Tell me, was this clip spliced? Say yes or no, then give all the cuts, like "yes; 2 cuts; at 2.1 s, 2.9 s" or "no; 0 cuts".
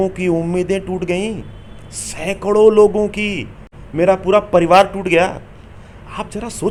no; 0 cuts